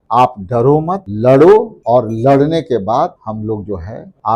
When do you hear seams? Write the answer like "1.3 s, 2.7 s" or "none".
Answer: 1.1 s, 1.8 s, 3.5 s

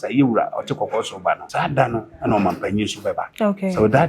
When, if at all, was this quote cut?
1.5 s, 3.3 s

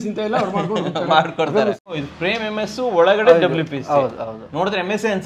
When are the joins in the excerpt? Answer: 1.9 s

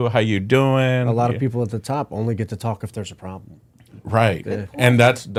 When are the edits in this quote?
none

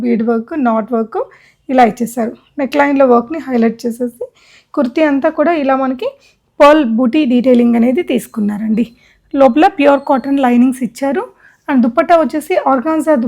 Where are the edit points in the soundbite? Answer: none

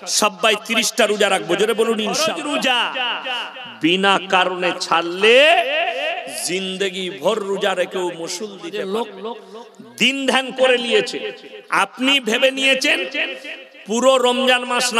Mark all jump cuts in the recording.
2.2 s, 8.6 s

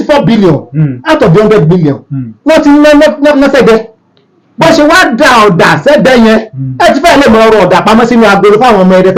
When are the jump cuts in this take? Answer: none

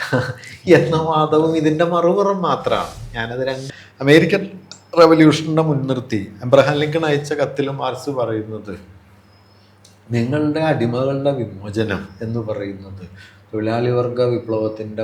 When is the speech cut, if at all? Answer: 3.6 s

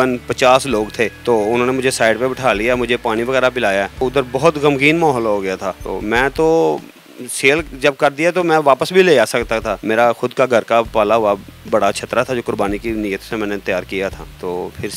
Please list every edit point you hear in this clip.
none

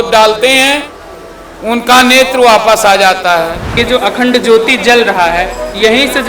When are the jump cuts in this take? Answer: 3.7 s

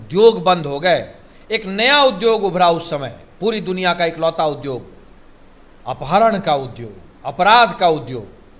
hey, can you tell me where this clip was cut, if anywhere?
none

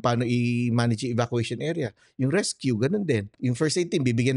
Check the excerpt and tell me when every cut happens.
3.3 s

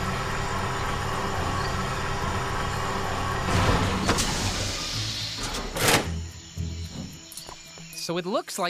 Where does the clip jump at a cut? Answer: 4.2 s

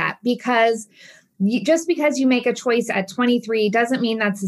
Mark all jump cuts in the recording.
1.2 s

